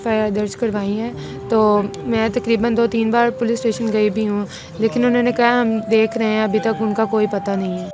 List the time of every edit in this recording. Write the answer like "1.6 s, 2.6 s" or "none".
none